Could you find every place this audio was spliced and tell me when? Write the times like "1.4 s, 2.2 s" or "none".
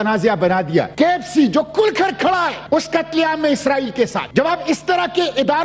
0.9 s, 2.6 s, 4.2 s